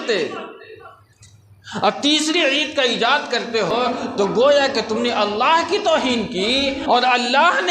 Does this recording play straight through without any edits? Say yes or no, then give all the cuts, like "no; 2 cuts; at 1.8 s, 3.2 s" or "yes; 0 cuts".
no; 2 cuts; at 3.7 s, 6.8 s